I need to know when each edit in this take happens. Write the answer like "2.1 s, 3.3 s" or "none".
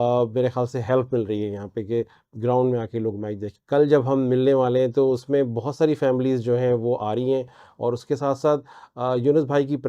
3.5 s